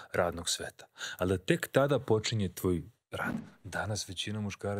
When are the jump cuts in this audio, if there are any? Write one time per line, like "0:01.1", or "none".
0:03.3